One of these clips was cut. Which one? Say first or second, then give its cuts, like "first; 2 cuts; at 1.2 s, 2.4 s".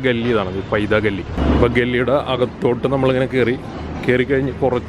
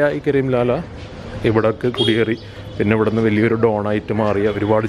first; 1 cut; at 1.3 s